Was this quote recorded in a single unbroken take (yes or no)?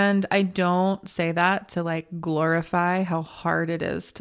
yes